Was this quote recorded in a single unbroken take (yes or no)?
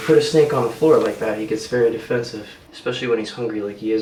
yes